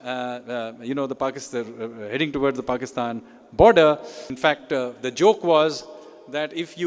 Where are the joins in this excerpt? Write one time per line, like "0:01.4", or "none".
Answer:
0:04.3